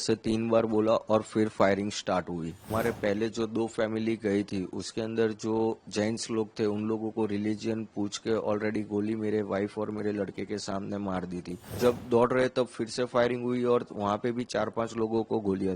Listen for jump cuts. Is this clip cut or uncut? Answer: cut